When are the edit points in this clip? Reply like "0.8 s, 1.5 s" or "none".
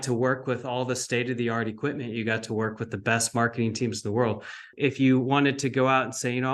4.7 s